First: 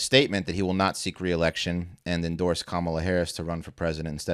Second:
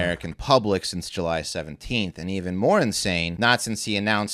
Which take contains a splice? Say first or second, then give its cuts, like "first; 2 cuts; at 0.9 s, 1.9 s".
second; 1 cut; at 3.3 s